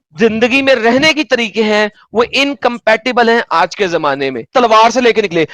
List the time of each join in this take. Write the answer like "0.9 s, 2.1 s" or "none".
4.5 s